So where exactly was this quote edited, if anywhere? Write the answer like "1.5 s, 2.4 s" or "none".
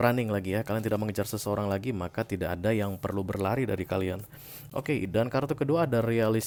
none